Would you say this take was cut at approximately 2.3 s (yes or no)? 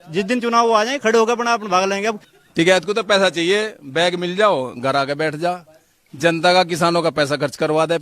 yes